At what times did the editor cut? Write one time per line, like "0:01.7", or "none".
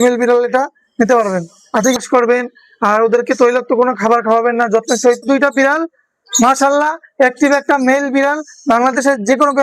0:01.9
0:05.2